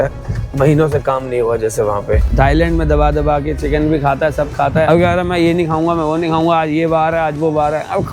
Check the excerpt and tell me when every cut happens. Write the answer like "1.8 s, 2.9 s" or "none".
2.3 s, 4.9 s